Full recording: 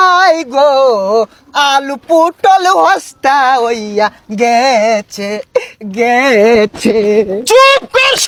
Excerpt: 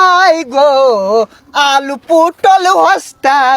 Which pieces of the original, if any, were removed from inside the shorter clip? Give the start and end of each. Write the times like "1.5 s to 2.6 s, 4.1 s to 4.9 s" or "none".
none